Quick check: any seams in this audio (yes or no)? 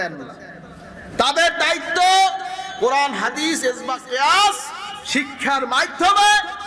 no